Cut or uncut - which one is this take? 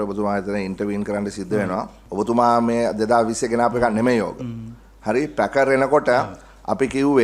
cut